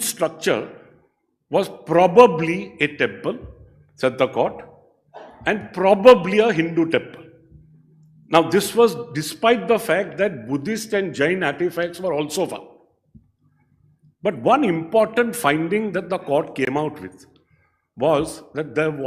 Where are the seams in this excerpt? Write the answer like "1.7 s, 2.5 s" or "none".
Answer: none